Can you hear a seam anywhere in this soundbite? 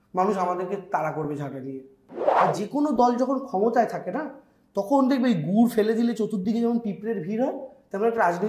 yes; 1 cut; at 2.4 s

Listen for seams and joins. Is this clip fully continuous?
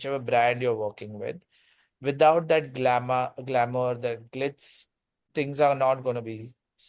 no; 1 cut; at 5.3 s

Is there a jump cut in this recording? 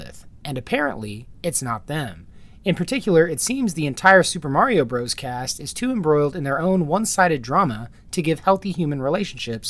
no; 0 cuts

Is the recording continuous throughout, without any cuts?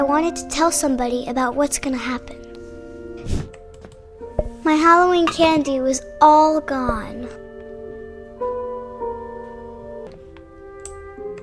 no; 2 cuts; at 3.2 s, 10.1 s

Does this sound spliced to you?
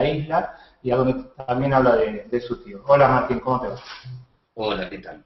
no; 0 cuts

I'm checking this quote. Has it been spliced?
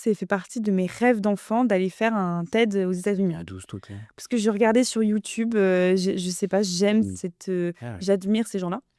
no; 0 cuts

